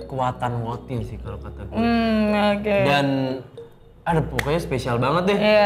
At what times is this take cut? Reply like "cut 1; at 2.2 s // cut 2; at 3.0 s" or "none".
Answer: none

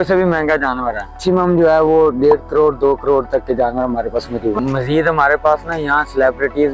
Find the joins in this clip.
cut 1; at 1.2 s // cut 2; at 4.6 s

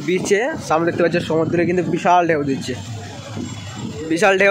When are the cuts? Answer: none

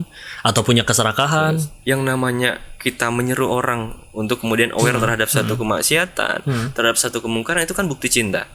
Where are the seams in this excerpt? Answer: cut 1; at 1.7 s

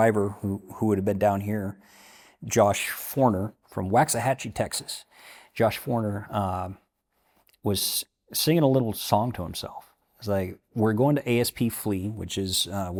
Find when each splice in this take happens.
none

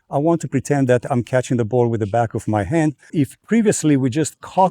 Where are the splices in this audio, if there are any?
cut 1; at 3.1 s

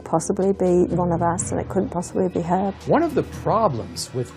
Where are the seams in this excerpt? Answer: cut 1; at 2.8 s

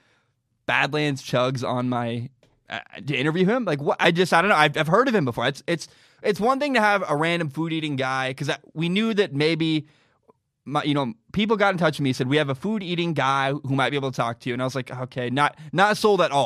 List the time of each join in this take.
none

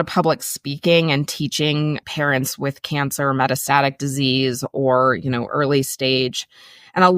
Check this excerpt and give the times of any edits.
cut 1; at 2.0 s

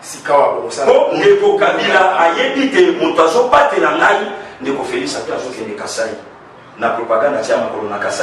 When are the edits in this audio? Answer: cut 1; at 5.3 s

